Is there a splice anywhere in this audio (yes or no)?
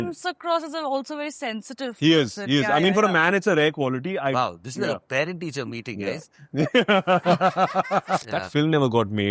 yes